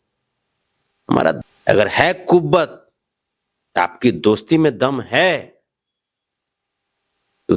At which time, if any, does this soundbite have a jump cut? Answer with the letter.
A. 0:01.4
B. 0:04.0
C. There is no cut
A